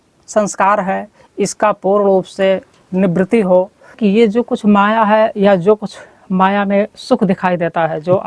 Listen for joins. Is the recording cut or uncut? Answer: cut